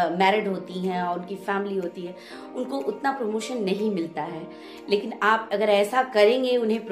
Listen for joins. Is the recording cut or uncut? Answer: uncut